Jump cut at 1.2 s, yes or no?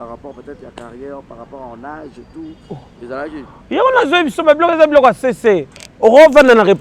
no